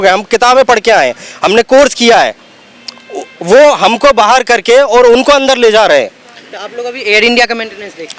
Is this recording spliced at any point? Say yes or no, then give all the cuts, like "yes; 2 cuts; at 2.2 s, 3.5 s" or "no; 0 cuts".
no; 0 cuts